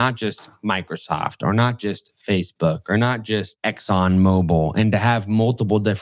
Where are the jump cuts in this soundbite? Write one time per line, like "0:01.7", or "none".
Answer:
0:03.5